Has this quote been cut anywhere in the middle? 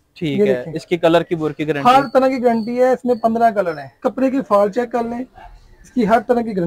yes; 1 cut; at 3.8 s

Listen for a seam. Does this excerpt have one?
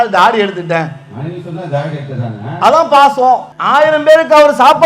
yes; 1 cut; at 3.5 s

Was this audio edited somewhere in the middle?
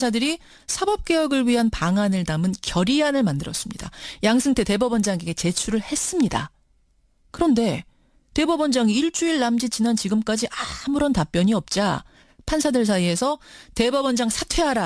no; 0 cuts

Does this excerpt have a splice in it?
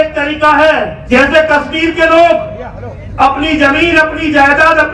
yes; 1 cut; at 1.0 s

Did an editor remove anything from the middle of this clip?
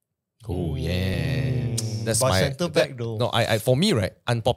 yes; 1 cut; at 1.1 s

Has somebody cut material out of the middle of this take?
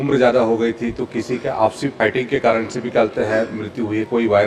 yes; 1 cut; at 1.9 s

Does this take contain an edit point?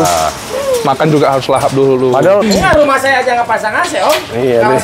yes; 1 cut; at 2.4 s

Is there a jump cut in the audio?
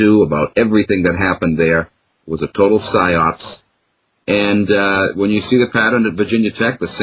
no; 0 cuts

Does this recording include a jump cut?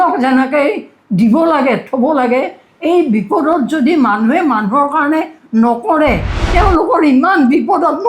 yes; 1 cut; at 6.3 s

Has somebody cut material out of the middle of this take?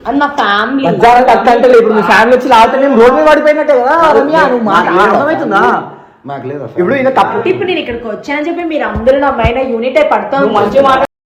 no; 0 cuts

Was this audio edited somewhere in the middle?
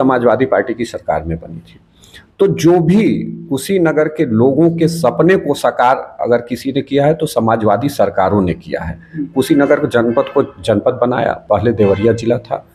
no; 0 cuts

